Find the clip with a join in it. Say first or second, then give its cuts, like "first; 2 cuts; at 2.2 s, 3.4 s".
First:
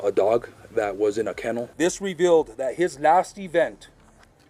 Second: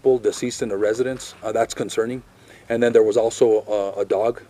first; 1 cut; at 1.7 s